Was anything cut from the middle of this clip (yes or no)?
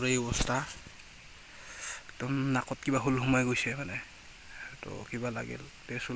no